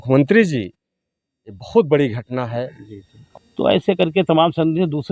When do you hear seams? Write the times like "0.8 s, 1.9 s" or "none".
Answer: 2.8 s